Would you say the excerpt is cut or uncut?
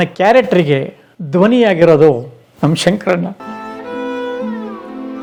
uncut